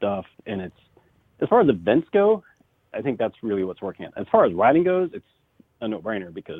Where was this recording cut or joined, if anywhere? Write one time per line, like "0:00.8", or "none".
none